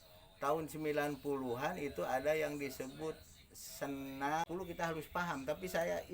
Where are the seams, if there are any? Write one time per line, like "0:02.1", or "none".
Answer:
0:04.5